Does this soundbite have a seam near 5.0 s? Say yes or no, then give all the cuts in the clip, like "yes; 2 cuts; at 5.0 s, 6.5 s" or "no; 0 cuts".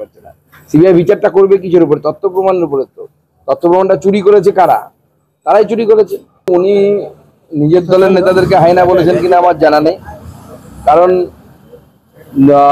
no; 1 cut; at 6.3 s